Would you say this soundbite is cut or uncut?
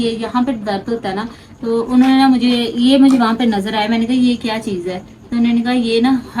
uncut